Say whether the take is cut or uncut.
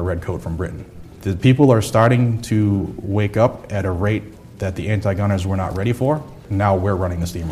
cut